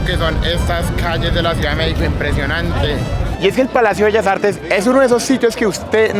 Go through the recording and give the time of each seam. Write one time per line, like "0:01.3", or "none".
0:03.2